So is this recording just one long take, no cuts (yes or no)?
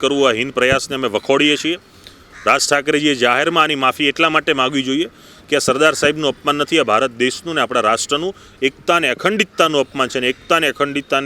yes